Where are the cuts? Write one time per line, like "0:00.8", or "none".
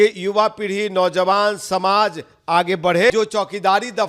0:03.1